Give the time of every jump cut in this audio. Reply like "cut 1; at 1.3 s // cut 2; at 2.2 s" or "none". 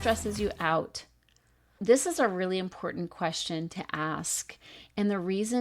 cut 1; at 1.8 s

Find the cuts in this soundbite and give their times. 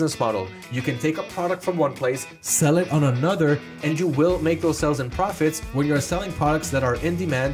none

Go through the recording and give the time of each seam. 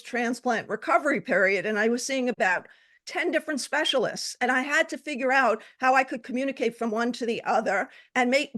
cut 1; at 2.4 s

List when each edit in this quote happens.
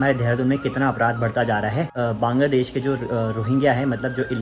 cut 1; at 1.9 s

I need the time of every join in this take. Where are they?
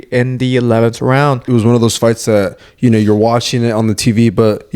cut 1; at 1.4 s

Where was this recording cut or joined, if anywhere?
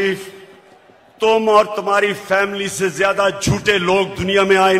none

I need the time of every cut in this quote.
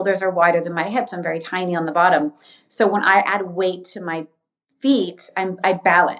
none

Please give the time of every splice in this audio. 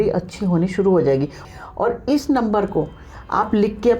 cut 1; at 1.5 s

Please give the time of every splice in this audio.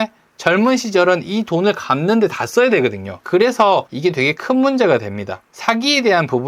cut 1; at 3.9 s

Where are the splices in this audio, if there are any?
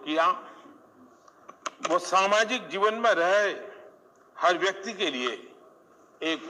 none

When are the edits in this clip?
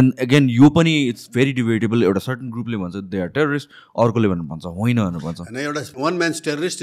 cut 1; at 5.9 s

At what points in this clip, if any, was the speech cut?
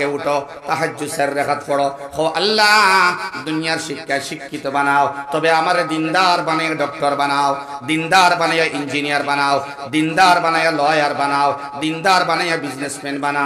none

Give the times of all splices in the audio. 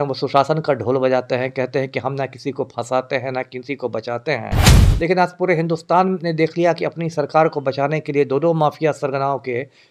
none

